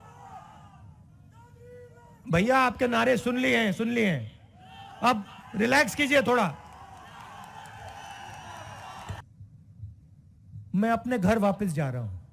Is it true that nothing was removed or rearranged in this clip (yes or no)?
no